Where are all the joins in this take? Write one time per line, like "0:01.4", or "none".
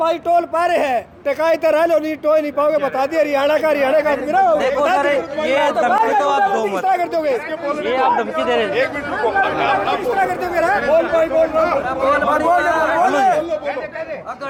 none

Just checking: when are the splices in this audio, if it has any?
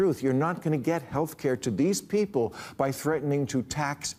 none

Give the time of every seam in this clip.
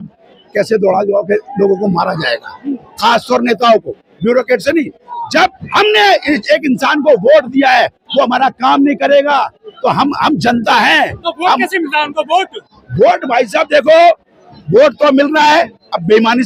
none

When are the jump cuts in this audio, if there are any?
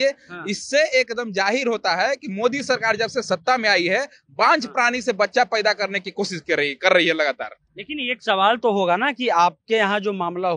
none

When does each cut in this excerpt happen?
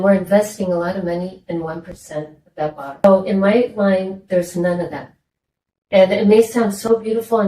0:03.0

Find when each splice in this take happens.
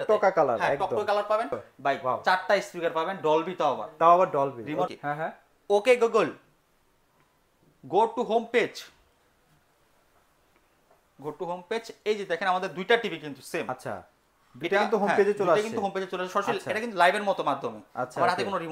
0:01.7
0:04.9

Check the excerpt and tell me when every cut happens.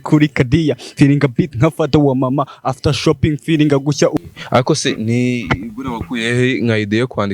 0:04.2

